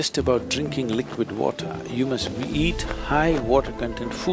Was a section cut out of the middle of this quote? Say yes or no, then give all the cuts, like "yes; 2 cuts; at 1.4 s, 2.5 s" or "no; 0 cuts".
no; 0 cuts